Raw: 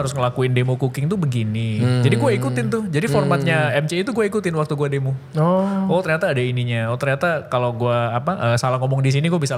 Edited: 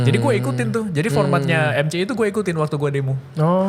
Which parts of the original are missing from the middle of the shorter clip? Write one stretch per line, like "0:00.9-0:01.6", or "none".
none